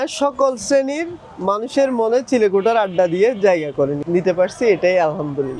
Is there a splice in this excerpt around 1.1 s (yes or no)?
no